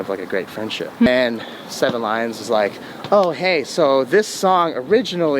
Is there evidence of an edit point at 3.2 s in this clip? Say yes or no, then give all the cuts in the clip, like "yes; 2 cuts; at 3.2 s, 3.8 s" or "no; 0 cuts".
no; 1 cut; at 1.1 s